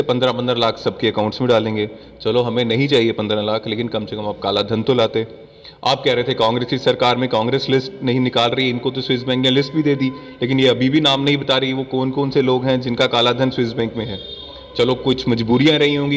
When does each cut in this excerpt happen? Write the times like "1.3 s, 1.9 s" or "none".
none